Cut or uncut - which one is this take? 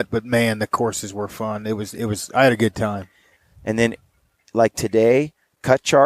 cut